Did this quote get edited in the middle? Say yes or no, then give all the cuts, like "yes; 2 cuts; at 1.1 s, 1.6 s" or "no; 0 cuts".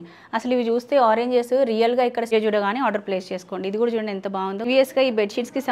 yes; 2 cuts; at 2.3 s, 4.7 s